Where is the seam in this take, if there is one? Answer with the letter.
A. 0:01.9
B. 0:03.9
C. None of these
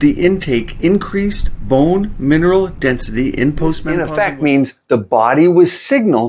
B